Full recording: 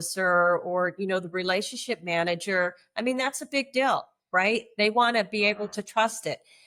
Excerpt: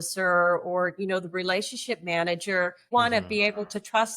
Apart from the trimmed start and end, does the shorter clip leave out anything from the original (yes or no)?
yes